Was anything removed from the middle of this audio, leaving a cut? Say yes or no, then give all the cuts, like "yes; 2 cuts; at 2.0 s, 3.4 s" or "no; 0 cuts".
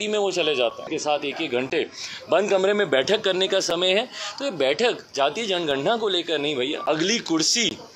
yes; 2 cuts; at 0.9 s, 6.8 s